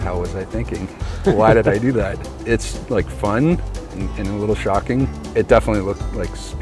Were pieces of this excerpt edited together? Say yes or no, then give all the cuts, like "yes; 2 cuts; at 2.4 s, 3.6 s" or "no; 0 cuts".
yes; 2 cuts; at 2.3 s, 5.2 s